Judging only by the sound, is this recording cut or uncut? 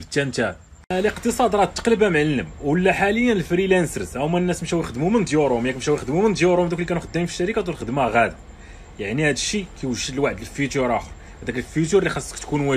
uncut